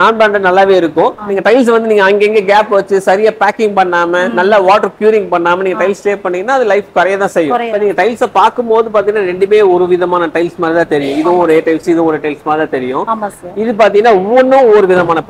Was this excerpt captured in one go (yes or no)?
no